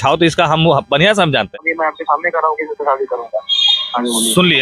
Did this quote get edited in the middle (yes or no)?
yes